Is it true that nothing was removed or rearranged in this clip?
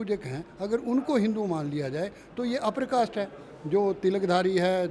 yes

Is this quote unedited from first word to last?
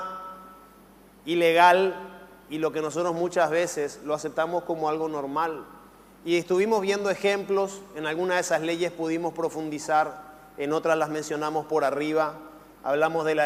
yes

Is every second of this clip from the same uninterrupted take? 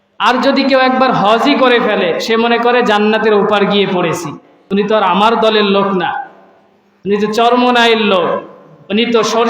no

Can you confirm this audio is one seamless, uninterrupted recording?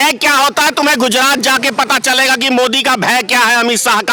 yes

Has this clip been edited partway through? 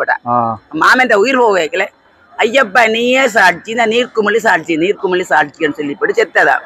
no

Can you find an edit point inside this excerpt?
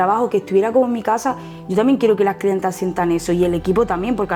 no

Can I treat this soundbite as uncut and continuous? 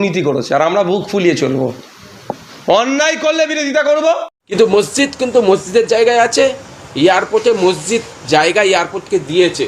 no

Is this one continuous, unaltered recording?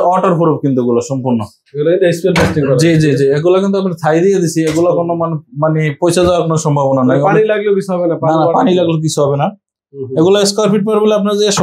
yes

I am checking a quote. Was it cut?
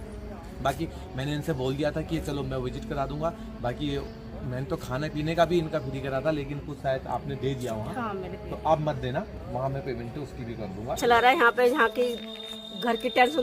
yes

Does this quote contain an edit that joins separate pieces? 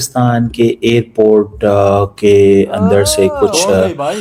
no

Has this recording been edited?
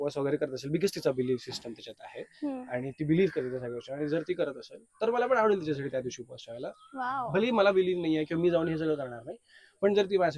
no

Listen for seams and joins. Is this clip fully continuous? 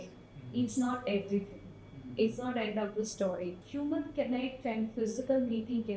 no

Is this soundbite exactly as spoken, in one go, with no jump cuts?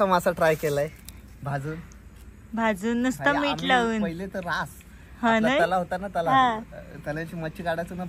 yes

